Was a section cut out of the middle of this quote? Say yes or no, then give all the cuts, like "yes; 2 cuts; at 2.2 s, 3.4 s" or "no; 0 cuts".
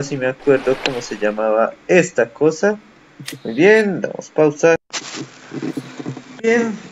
no; 0 cuts